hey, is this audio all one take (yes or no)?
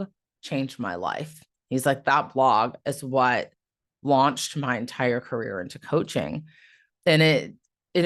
yes